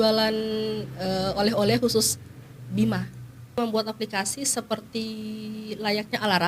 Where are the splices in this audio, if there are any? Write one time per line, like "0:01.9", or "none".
0:03.6

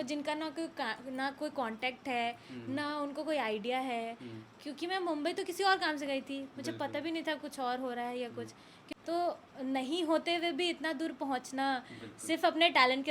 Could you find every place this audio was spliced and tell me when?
none

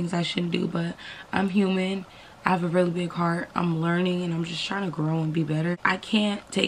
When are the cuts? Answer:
0:05.8

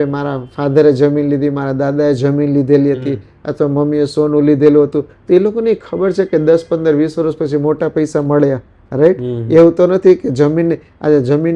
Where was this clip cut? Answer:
none

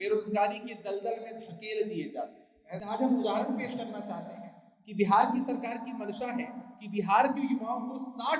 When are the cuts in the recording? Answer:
0:02.8

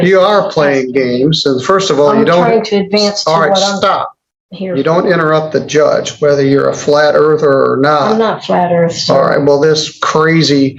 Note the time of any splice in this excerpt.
none

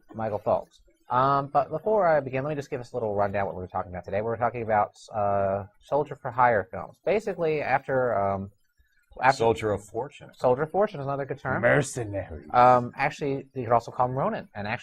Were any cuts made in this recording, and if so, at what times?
0:10.0

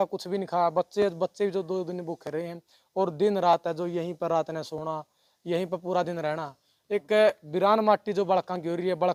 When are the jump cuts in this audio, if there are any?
none

